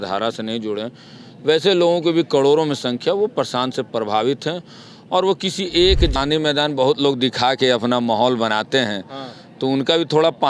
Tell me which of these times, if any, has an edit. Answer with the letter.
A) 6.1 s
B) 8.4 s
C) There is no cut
A